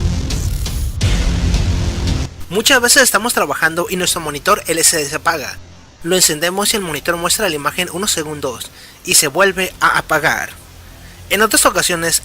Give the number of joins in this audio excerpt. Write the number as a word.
one